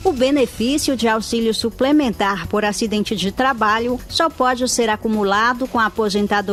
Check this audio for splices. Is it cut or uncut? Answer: uncut